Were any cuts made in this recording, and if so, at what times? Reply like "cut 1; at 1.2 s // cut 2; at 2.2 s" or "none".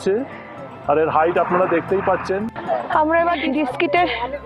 cut 1; at 2.5 s